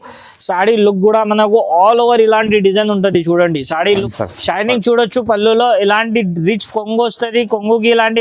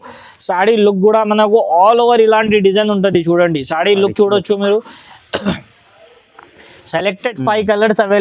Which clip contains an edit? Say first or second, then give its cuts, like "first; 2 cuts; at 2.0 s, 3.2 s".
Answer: first; 1 cut; at 4.0 s